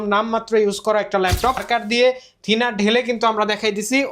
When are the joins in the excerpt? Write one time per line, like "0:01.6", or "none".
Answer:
0:01.6